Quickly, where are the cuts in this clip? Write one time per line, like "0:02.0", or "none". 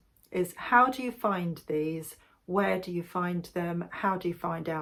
none